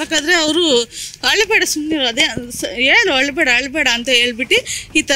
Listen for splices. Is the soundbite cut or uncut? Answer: uncut